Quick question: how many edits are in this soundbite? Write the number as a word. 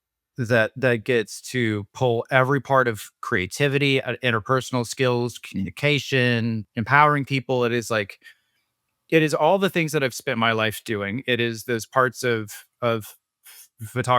one